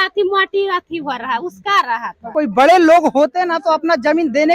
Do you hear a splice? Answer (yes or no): yes